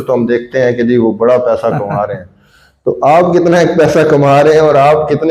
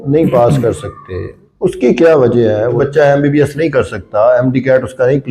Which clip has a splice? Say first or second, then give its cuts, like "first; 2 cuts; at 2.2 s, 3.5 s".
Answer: second; 1 cut; at 2.8 s